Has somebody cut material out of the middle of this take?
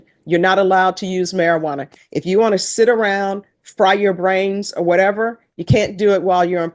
no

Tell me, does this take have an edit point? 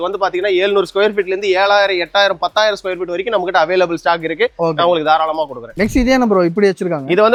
no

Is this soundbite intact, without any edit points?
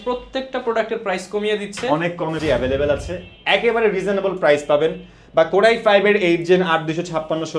no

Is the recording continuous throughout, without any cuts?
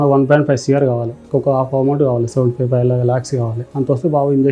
no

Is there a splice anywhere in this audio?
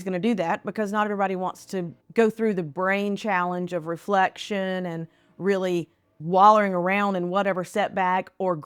yes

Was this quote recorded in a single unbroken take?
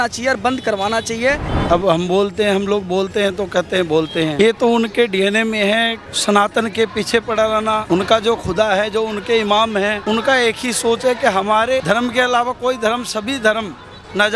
no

